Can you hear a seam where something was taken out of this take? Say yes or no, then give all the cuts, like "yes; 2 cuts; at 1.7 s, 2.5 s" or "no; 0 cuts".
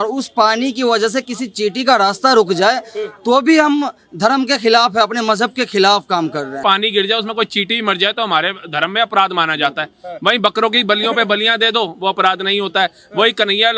yes; 1 cut; at 6.6 s